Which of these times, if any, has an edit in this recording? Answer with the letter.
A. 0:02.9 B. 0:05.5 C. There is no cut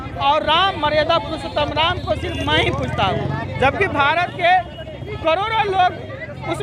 C